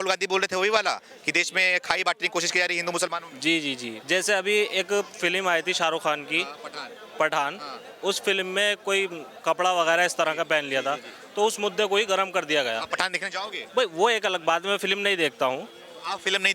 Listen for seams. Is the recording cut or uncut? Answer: cut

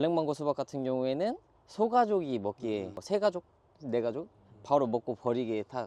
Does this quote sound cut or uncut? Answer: uncut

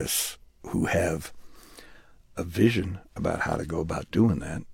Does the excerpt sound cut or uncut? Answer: uncut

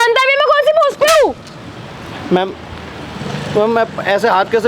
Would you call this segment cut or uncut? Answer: uncut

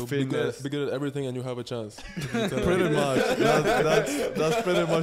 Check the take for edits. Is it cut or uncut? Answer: uncut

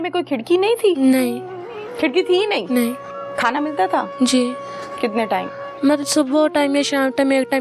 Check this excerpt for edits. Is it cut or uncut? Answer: uncut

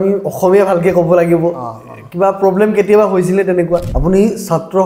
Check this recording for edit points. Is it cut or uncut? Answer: cut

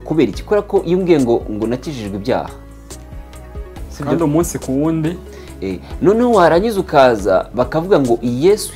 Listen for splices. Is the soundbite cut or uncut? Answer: uncut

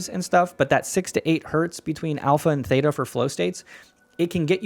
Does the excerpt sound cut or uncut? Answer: uncut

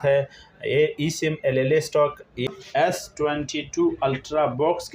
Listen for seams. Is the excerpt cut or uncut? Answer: cut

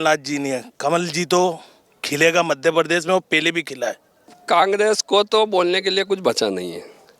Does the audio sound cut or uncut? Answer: cut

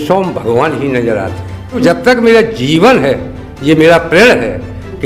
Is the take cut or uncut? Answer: cut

